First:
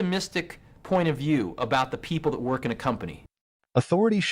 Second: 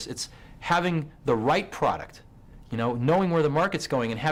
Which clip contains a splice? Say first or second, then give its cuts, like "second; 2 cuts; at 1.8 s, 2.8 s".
first; 1 cut; at 3.2 s